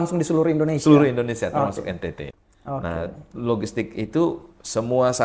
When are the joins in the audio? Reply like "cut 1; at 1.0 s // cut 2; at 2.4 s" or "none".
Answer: cut 1; at 2.3 s